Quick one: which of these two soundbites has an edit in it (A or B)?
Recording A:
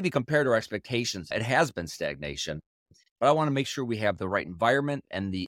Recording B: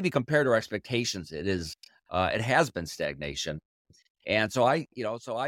A